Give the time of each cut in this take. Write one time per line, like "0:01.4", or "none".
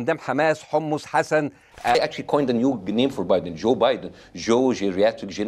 0:01.9